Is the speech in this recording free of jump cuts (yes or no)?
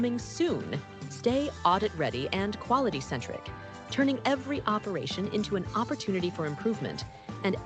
no